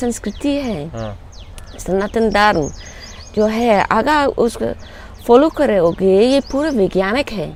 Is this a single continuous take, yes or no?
yes